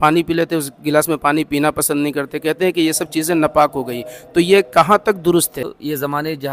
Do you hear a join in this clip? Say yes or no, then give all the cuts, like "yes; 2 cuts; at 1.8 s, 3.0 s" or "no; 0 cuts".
yes; 1 cut; at 5.6 s